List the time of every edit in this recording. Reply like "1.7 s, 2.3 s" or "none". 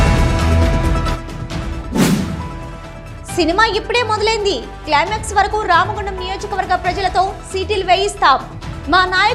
2.2 s